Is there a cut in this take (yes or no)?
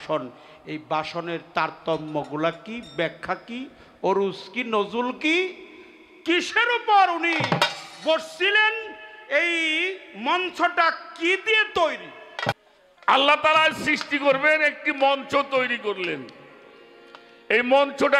yes